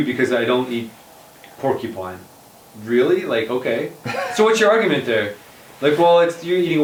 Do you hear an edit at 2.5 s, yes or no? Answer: no